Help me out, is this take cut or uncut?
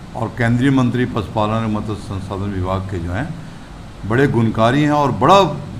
uncut